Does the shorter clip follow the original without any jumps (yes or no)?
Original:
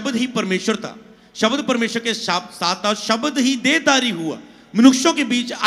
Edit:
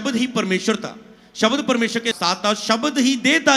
no